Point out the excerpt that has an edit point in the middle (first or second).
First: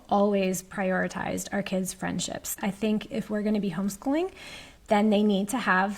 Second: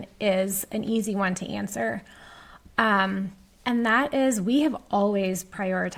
first